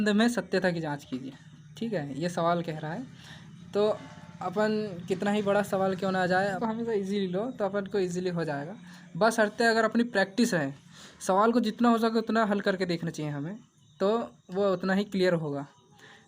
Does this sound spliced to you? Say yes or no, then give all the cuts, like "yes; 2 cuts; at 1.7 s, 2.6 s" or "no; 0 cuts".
yes; 1 cut; at 6.6 s